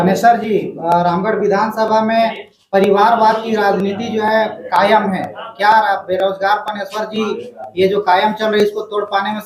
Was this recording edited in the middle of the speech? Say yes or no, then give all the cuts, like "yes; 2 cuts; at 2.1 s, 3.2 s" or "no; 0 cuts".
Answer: no; 0 cuts